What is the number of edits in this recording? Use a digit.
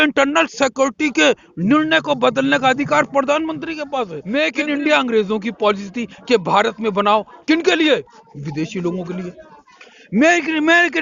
1